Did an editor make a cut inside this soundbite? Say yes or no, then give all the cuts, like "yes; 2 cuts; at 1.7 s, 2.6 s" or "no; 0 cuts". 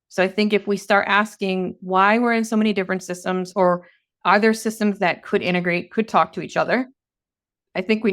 no; 0 cuts